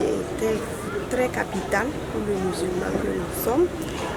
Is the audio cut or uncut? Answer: uncut